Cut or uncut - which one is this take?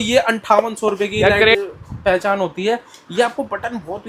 cut